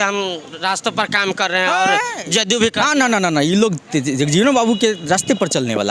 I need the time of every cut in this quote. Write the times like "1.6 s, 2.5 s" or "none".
none